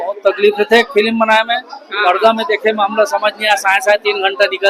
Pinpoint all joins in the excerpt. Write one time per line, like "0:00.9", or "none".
none